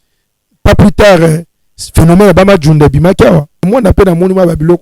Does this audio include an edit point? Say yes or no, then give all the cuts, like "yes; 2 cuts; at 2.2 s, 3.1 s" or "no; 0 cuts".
yes; 1 cut; at 3.6 s